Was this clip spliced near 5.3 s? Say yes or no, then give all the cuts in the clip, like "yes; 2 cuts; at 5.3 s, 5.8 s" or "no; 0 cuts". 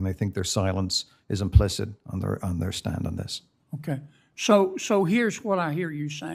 no; 1 cut; at 4.0 s